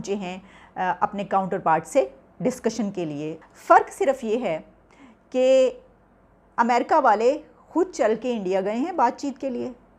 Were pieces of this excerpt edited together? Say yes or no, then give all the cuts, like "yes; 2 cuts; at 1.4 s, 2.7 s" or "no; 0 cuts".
yes; 1 cut; at 3.3 s